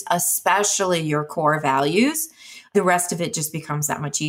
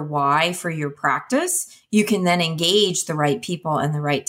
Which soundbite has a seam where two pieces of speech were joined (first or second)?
first